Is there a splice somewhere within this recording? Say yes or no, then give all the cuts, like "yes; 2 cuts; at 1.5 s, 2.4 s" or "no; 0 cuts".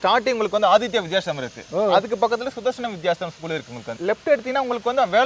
no; 0 cuts